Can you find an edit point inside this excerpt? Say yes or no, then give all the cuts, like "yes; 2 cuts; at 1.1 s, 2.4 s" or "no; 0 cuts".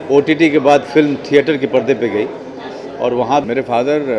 yes; 1 cut; at 3.3 s